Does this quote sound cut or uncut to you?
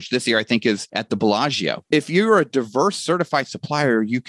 cut